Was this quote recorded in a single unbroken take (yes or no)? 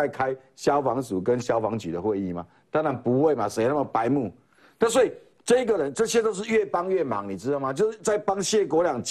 yes